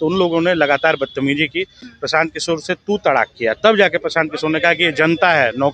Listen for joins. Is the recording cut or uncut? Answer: uncut